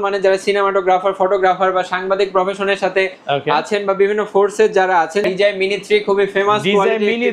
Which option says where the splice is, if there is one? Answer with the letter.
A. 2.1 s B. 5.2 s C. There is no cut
B